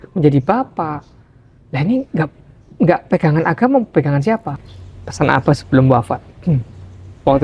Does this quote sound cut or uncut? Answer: cut